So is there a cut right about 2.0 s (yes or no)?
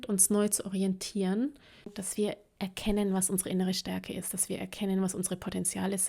yes